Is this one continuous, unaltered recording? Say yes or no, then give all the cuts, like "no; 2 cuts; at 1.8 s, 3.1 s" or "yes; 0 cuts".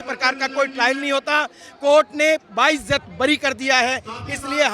yes; 0 cuts